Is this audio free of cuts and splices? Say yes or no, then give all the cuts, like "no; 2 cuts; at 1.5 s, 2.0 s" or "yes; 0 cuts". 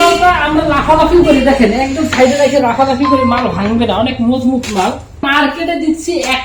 no; 1 cut; at 5.3 s